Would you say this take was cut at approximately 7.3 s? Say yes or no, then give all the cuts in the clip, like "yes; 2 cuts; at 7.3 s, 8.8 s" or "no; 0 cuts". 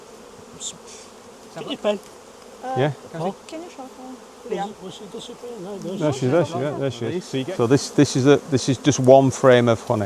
yes; 1 cut; at 7.3 s